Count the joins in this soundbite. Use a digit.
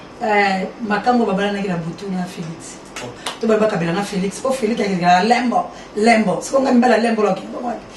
1